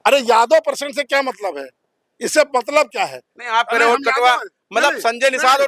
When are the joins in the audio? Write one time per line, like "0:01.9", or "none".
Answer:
none

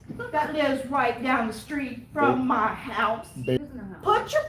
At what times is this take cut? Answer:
0:03.6

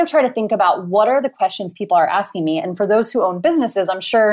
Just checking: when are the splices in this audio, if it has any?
none

